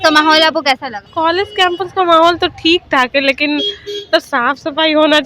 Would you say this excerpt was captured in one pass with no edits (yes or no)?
no